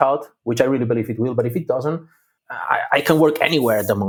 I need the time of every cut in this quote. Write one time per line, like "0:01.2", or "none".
none